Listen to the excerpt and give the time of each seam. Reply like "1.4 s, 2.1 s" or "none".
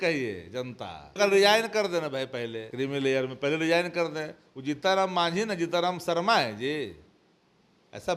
1.1 s, 2.6 s

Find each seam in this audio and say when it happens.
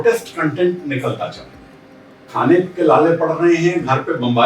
2.2 s

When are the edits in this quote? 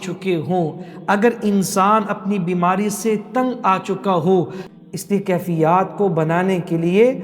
4.6 s

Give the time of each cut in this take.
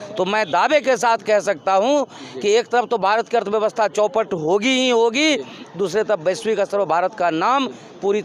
none

